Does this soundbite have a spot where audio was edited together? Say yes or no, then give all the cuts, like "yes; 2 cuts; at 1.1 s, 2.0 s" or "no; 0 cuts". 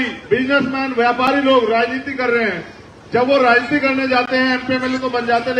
no; 0 cuts